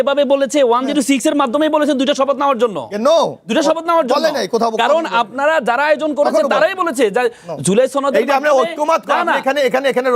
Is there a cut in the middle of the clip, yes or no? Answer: no